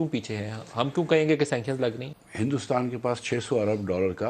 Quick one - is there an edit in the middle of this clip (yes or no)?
yes